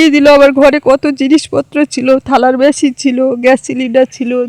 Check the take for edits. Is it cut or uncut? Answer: uncut